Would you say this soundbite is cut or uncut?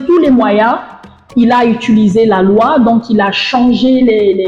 uncut